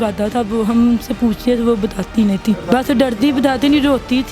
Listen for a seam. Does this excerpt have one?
yes; 1 cut; at 2.6 s

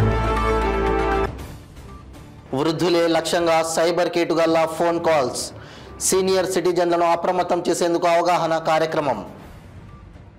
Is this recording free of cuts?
yes; 0 cuts

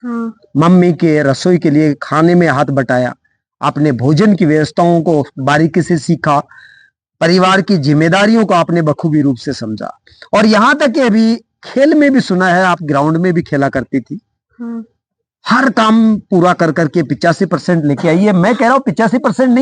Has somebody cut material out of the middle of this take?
no; 0 cuts

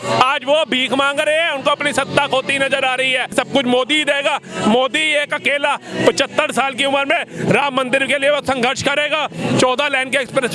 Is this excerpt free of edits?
no; 1 cut; at 3.3 s

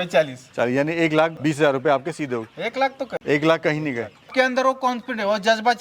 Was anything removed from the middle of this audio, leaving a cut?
yes; 3 cuts; at 1.4 s, 3.2 s, 4.3 s

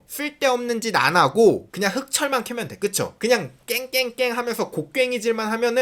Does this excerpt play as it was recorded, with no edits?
yes; 0 cuts

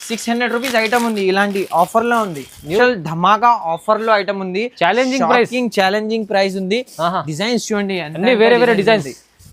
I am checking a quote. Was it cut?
yes; 1 cut; at 2.8 s

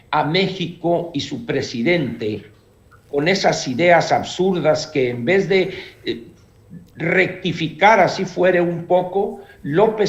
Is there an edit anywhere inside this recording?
no; 0 cuts

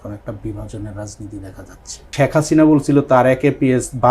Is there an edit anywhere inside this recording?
yes; 1 cut; at 2.0 s

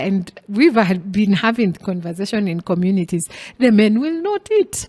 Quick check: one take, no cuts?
yes; 0 cuts

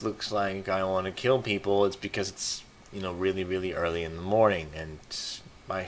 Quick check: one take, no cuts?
yes; 0 cuts

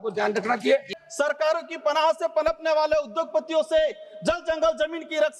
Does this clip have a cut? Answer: yes; 1 cut; at 0.9 s

